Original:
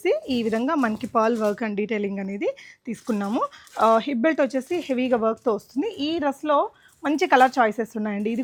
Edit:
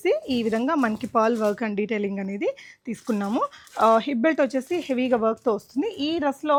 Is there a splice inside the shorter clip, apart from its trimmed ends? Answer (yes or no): no